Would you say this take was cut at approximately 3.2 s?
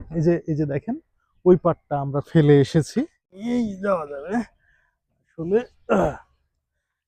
yes; 1 cut; at 3.2 s

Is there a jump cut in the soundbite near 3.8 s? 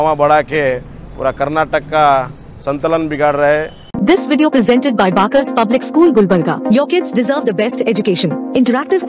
yes; 1 cut; at 3.8 s

